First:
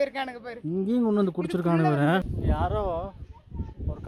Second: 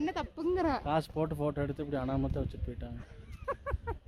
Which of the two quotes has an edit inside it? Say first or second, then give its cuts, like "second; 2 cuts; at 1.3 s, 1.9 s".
first; 1 cut; at 2.3 s